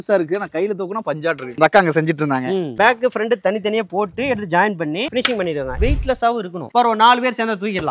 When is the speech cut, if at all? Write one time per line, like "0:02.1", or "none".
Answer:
0:02.7
0:05.8